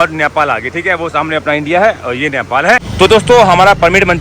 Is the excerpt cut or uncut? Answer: cut